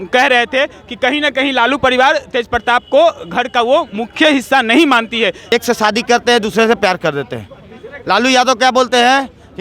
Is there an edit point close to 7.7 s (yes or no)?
no